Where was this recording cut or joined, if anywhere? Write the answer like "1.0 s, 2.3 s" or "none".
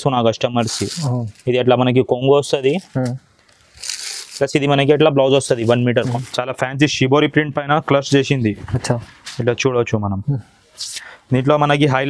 5.9 s